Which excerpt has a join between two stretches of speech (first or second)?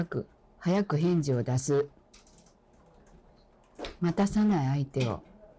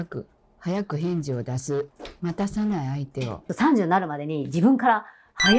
second